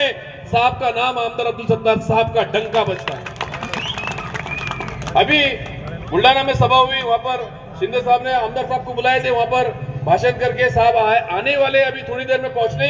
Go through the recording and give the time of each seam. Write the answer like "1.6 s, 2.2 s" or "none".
none